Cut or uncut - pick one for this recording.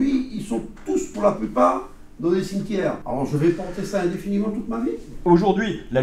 cut